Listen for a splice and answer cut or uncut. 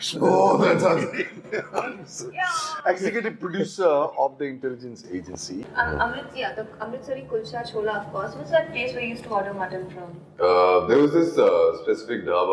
cut